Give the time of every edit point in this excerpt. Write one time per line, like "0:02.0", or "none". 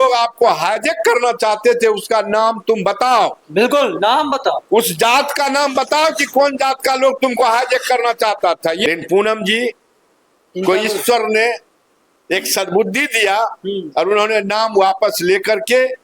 0:08.8

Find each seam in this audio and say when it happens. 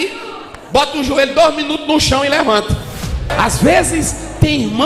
0:03.3

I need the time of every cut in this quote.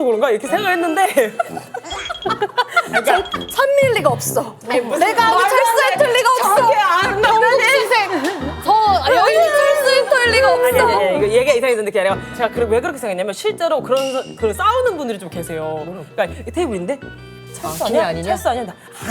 none

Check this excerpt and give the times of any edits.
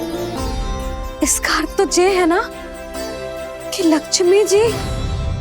0:01.1

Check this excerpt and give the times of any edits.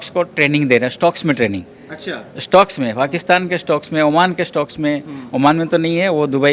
none

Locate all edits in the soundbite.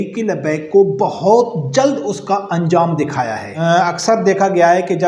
0:03.4

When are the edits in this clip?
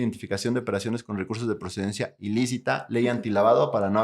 0:02.8

